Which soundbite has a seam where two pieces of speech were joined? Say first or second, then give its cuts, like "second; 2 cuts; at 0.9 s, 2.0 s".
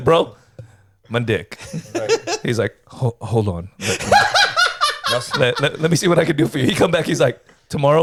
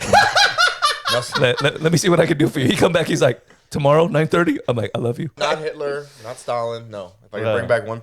second; 1 cut; at 5.4 s